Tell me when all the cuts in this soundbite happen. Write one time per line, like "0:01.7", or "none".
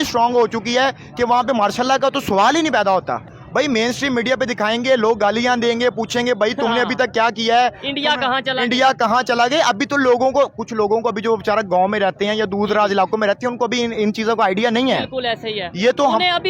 0:03.3